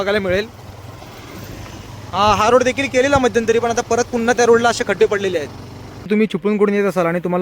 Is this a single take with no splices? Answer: no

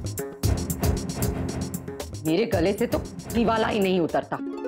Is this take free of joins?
no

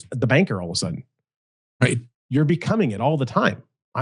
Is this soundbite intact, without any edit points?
yes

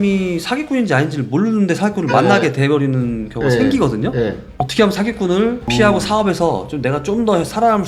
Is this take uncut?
yes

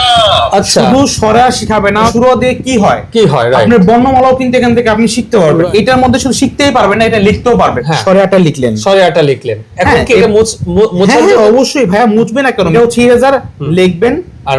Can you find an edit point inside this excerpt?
yes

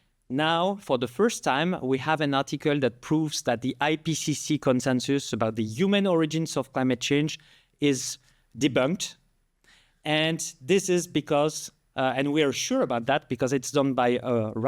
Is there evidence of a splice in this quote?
no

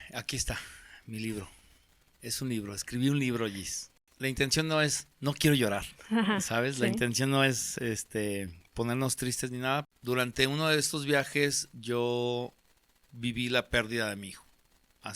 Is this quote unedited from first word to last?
no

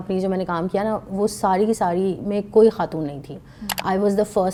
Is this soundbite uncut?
yes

